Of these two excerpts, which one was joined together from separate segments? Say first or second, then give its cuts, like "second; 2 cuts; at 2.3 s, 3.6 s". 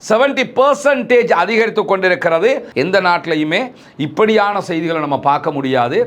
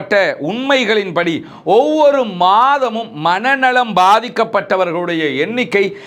first; 1 cut; at 2.7 s